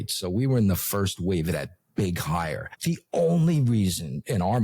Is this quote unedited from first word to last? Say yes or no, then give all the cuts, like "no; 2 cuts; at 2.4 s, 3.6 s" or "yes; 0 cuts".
no; 1 cut; at 2.7 s